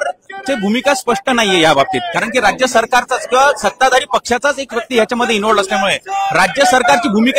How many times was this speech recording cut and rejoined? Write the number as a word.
zero